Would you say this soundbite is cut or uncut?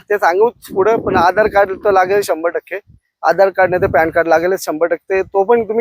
uncut